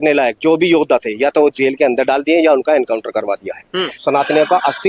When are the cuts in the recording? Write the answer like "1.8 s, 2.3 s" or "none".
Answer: 4.0 s